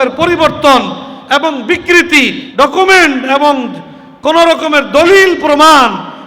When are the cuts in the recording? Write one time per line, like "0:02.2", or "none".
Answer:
0:02.4